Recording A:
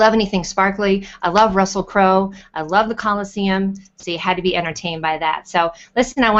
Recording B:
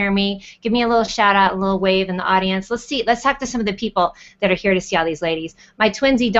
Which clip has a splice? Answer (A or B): A